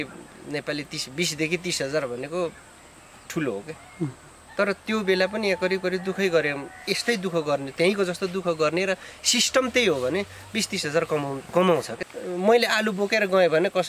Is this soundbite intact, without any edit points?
no; 1 cut; at 11.9 s

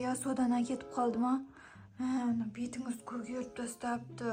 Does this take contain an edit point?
no; 0 cuts

